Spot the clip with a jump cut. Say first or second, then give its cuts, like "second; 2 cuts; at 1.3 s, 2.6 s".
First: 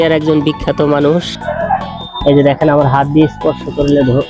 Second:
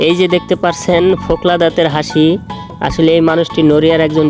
first; 1 cut; at 1.5 s